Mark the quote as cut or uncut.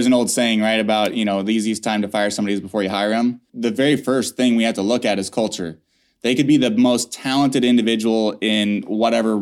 cut